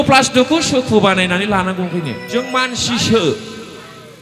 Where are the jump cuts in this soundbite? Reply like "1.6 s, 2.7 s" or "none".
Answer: 2.2 s